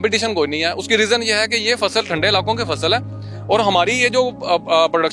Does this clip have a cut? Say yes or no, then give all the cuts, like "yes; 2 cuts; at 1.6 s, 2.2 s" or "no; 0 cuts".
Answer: no; 0 cuts